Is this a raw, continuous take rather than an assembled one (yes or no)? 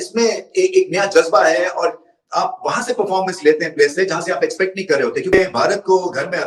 yes